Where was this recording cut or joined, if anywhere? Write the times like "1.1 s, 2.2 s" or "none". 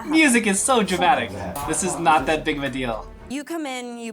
1.5 s, 3.1 s